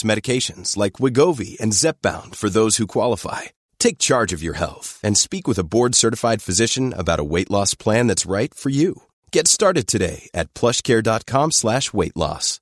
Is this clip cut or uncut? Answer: uncut